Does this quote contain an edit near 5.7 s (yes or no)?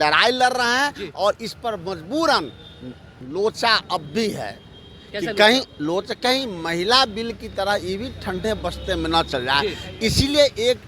no